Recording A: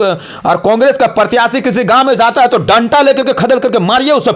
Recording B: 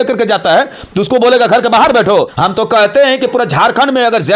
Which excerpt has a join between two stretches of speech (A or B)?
B